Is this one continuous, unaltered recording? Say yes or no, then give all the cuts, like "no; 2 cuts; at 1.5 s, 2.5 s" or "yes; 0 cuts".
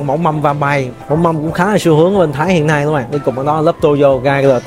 yes; 0 cuts